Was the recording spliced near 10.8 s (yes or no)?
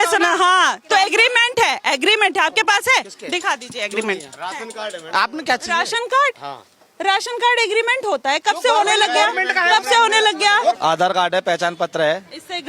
yes